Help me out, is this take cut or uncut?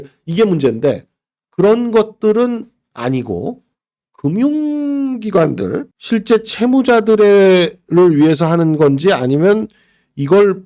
cut